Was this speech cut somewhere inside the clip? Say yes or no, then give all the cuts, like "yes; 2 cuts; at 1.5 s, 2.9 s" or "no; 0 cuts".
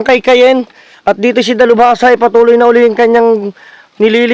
no; 0 cuts